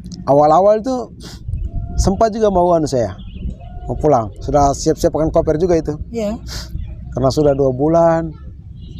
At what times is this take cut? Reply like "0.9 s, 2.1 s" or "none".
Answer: none